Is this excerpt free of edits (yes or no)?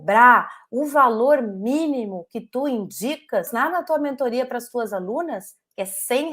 no